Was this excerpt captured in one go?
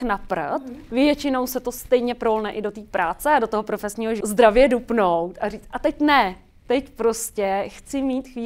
no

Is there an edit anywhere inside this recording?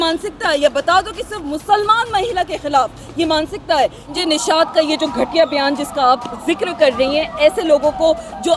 yes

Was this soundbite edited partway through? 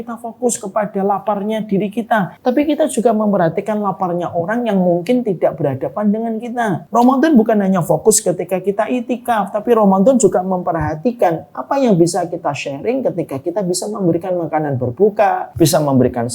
yes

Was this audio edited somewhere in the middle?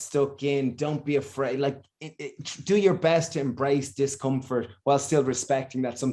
no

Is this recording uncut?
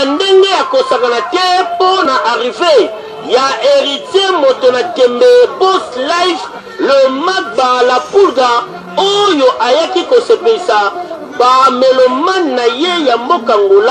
no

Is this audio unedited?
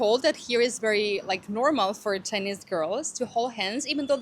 yes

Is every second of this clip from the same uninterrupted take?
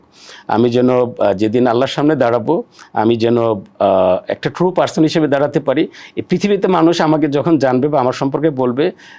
yes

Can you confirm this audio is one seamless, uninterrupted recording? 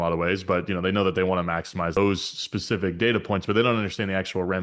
no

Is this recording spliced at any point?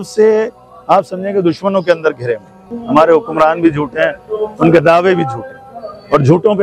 yes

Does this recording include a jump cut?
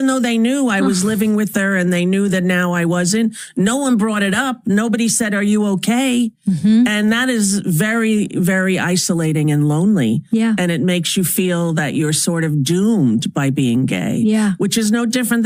no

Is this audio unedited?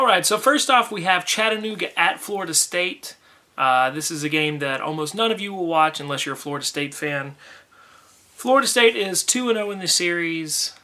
yes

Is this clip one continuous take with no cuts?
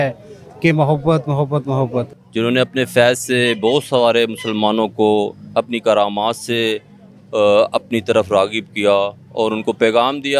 no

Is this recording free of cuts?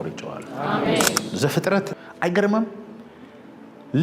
no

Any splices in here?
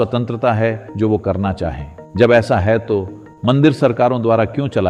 no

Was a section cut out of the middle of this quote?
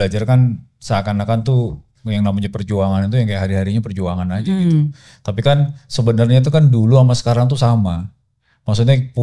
no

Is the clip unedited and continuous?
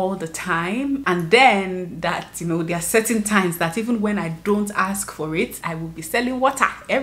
no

